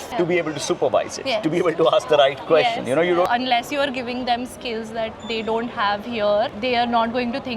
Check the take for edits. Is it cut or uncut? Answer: cut